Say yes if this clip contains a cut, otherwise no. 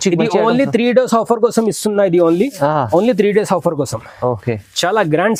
no